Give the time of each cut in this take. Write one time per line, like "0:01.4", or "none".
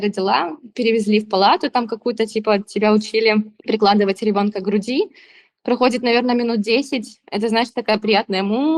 none